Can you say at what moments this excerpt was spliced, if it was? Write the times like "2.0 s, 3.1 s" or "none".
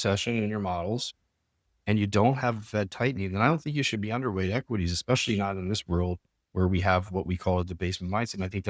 none